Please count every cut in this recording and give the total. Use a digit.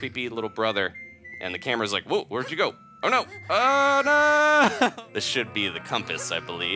1